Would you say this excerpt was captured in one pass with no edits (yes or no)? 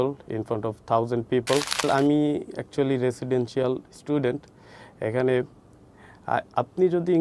no